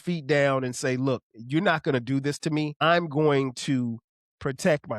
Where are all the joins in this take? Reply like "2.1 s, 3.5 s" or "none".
2.7 s